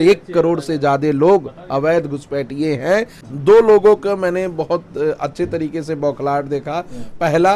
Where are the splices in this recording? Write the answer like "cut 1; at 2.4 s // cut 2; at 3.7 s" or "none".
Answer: cut 1; at 3.2 s